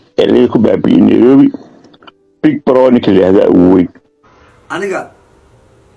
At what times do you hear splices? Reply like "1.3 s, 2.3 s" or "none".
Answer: 4.5 s